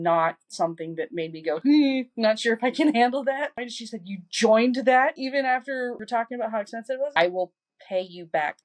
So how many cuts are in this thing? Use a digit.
2